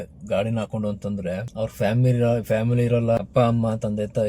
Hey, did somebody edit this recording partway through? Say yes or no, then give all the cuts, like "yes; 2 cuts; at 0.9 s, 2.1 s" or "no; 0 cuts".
yes; 2 cuts; at 1.5 s, 3.2 s